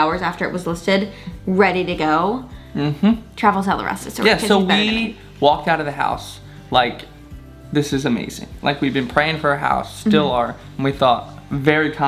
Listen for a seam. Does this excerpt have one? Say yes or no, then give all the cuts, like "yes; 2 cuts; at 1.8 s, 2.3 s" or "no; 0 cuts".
no; 0 cuts